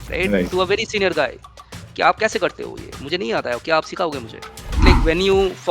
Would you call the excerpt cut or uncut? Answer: cut